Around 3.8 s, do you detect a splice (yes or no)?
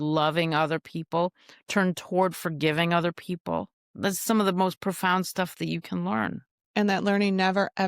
yes